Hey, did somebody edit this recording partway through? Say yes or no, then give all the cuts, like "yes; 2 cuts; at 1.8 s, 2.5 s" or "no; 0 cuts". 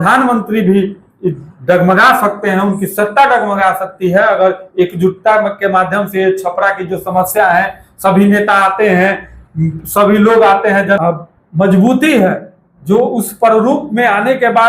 yes; 1 cut; at 11.0 s